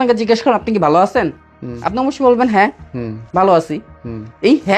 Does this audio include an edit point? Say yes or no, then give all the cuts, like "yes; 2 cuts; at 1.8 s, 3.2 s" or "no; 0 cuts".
no; 0 cuts